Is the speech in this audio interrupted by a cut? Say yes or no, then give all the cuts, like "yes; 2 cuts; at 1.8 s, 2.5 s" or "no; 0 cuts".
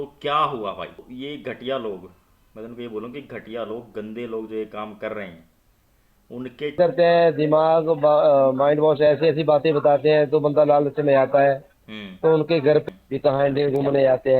yes; 3 cuts; at 1.0 s, 6.8 s, 12.8 s